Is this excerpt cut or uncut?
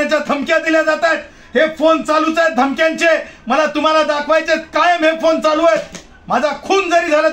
uncut